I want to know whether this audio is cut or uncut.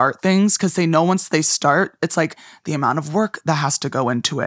uncut